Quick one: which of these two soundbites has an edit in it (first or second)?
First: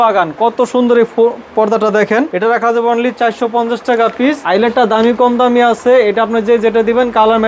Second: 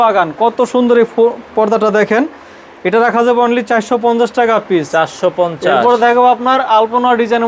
first